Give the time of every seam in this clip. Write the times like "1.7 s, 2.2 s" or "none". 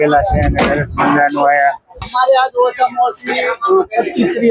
2.0 s

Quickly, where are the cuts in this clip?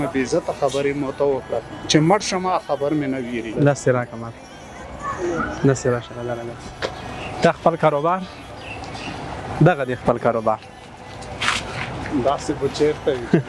1.8 s, 3.5 s

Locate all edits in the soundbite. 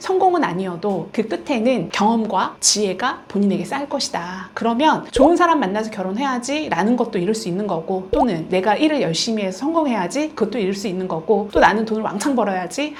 none

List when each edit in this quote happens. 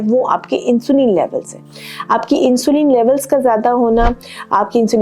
none

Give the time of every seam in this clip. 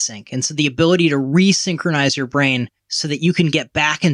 2.8 s

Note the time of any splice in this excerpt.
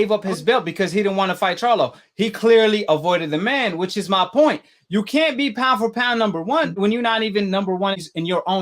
6.7 s

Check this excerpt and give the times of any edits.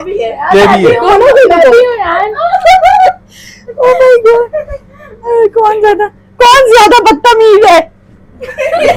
none

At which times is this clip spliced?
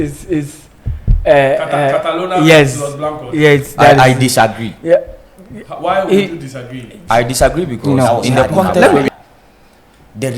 9.1 s

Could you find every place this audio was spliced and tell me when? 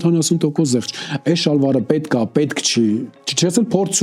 none

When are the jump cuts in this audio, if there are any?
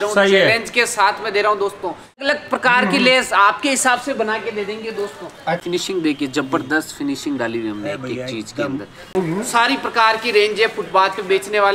2.2 s, 5.6 s, 9.1 s

